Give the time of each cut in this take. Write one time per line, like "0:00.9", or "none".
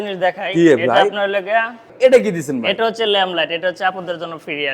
0:01.8